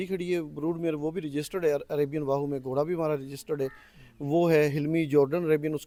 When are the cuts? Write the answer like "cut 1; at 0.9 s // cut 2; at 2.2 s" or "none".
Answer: none